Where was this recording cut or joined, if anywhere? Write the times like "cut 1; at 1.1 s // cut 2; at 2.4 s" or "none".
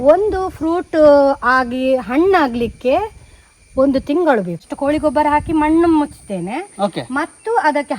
cut 1; at 4.6 s